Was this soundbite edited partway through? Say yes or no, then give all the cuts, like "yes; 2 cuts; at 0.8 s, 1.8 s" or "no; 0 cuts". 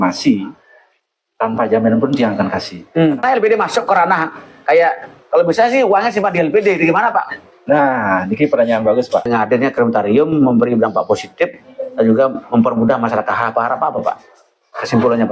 yes; 2 cuts; at 3.2 s, 9.3 s